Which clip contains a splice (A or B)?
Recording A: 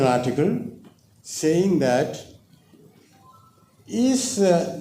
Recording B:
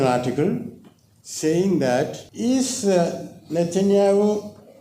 B